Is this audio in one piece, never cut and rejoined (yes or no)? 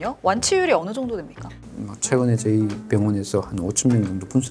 no